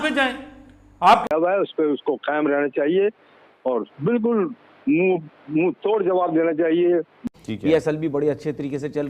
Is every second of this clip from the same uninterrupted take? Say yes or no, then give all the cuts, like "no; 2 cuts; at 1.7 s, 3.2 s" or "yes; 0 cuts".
no; 2 cuts; at 1.3 s, 7.2 s